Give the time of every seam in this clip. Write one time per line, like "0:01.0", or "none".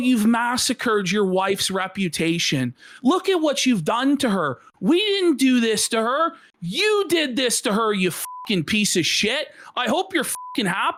none